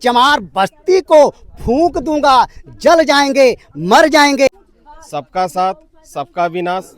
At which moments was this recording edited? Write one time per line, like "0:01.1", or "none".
0:04.5